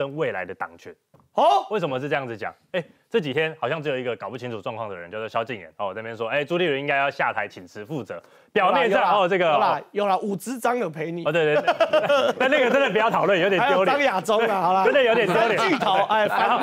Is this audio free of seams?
yes; 0 cuts

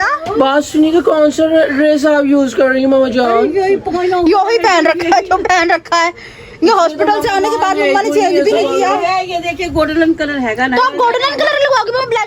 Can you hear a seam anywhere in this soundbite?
yes; 1 cut; at 3.8 s

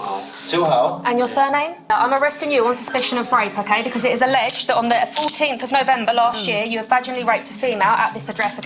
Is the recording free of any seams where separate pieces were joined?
no; 1 cut; at 1.9 s

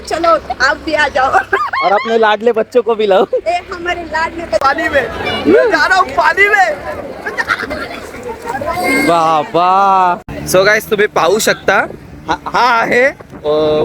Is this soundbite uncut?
no; 2 cuts; at 4.6 s, 10.3 s

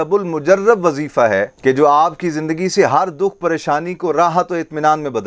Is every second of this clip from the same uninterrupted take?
yes; 0 cuts

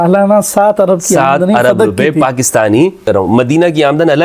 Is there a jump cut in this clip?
yes; 1 cut; at 3.1 s

